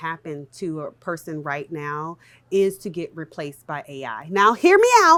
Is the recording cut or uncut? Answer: uncut